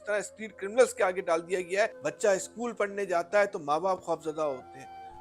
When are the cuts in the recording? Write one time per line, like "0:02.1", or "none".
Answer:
0:02.0